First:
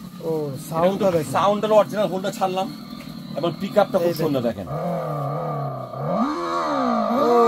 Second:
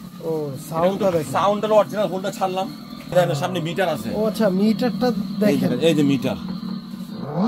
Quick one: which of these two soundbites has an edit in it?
second; 1 cut; at 3.1 s

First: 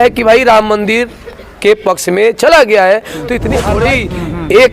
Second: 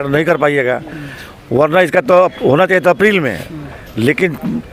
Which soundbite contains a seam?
first; 1 cut; at 3.7 s

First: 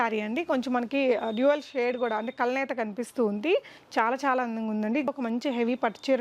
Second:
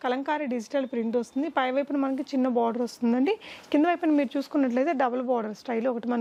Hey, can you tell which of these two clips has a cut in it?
first; 1 cut; at 5.1 s

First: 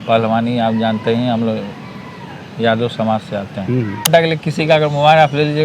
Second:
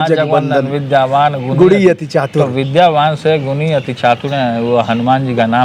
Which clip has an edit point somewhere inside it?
first; 1 cut; at 4.1 s

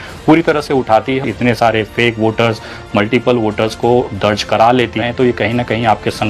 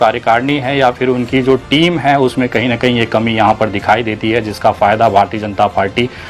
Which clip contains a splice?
first; 2 cuts; at 1.2 s, 5.0 s

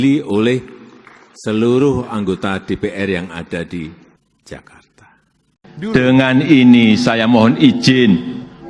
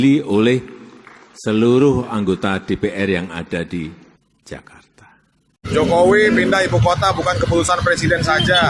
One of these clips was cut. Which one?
second; 1 cut; at 5.5 s

